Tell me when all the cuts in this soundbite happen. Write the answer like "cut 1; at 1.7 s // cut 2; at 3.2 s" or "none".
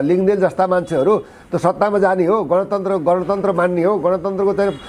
none